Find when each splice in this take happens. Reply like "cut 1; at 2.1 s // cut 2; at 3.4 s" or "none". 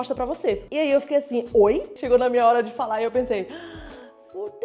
cut 1; at 1.9 s